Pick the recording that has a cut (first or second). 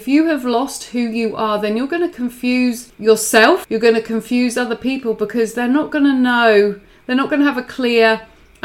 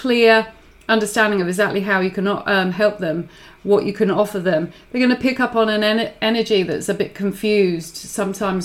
first